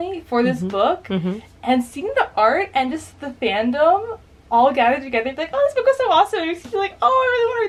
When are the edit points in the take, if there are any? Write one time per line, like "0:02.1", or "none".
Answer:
none